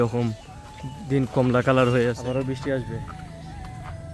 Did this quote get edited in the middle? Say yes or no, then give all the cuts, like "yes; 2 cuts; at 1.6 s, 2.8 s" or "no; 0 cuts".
yes; 1 cut; at 2.2 s